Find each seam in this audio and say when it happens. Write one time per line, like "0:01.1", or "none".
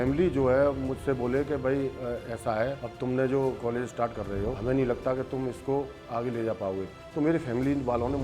0:03.6